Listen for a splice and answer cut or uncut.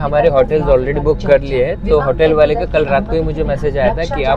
uncut